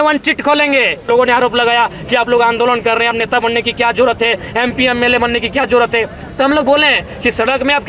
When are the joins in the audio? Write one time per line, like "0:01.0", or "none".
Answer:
0:01.1